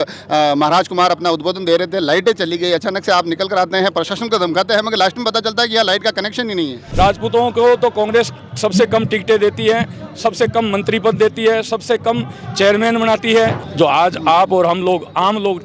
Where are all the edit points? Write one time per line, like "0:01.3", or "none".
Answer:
0:06.8
0:13.6